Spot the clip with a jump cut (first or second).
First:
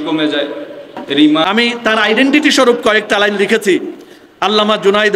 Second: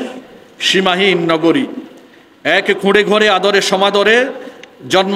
first